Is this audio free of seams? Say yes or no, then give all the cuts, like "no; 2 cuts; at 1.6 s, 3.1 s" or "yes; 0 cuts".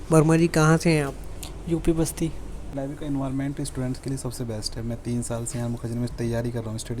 no; 1 cut; at 2.7 s